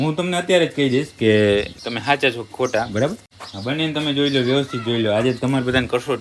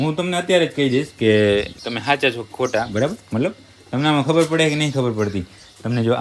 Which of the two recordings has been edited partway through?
first; 1 cut; at 3.2 s

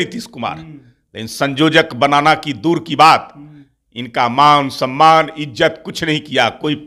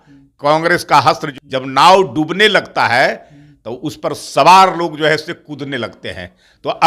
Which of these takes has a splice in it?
second; 1 cut; at 1.3 s

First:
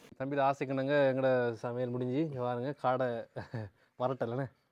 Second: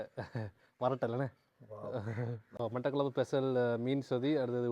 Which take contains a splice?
second; 1 cut; at 2.4 s

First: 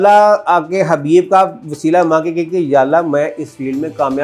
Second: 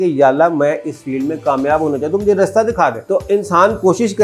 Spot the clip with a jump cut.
second; 1 cut; at 3.0 s

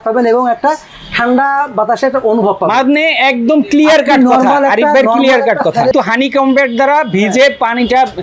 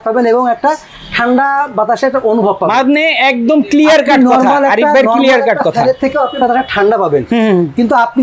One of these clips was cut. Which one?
first; 1 cut; at 5.9 s

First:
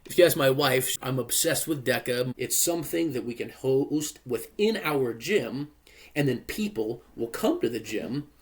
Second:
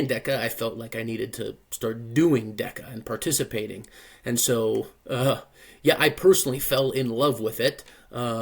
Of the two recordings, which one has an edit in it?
first; 2 cuts; at 0.9 s, 2.3 s

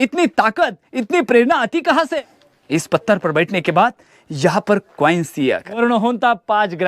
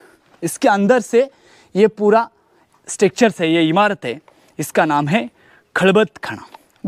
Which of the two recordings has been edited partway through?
first; 2 cuts; at 2.1 s, 5.8 s

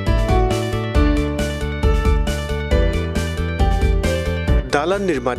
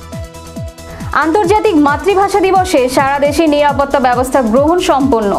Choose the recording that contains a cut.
second; 1 cut; at 1.1 s

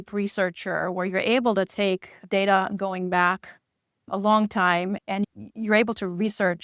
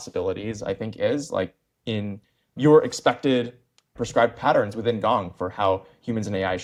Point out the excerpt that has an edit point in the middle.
first; 1 cut; at 5.0 s

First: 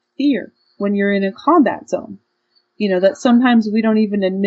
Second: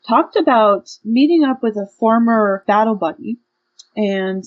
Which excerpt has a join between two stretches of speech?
second; 2 cuts; at 0.9 s, 2.6 s

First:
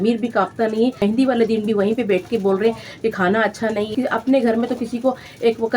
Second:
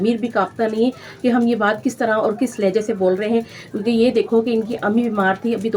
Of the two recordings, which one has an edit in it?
first; 2 cuts; at 1.0 s, 3.9 s

